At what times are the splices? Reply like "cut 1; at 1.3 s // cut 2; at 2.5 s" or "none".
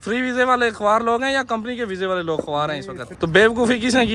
cut 1; at 3.0 s